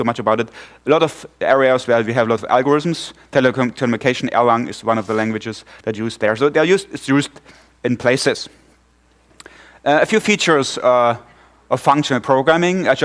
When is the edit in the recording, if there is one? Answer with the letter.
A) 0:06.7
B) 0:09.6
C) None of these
A